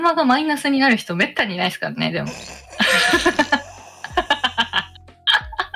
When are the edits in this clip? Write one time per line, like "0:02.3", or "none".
none